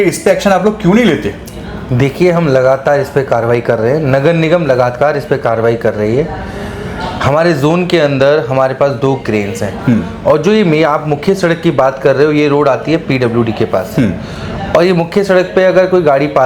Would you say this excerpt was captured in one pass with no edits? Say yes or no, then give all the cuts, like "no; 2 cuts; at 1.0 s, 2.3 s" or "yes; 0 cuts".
yes; 0 cuts